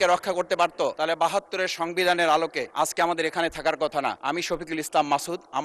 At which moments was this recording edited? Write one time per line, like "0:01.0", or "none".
0:00.9
0:02.6
0:04.2

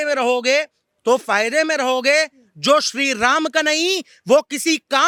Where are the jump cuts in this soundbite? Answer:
none

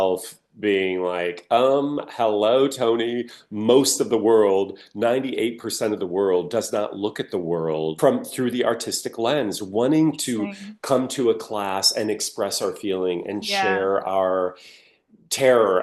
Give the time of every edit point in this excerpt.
0:08.0

